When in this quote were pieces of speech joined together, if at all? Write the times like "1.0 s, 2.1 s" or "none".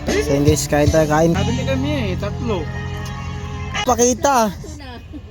1.4 s, 3.8 s